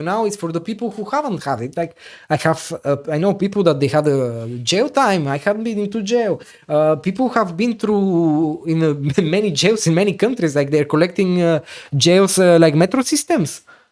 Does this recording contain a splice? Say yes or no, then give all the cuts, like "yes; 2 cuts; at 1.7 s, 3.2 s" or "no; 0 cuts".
no; 0 cuts